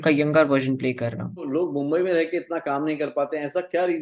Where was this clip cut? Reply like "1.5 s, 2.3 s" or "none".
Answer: 1.4 s